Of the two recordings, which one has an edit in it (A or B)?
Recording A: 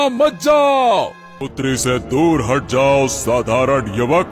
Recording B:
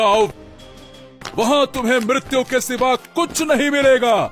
A